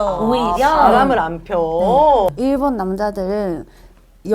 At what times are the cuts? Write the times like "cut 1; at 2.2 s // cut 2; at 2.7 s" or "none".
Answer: cut 1; at 2.3 s